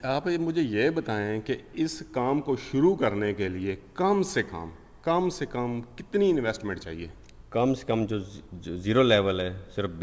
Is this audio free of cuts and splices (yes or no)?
yes